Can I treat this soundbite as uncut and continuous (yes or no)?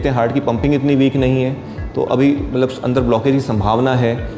yes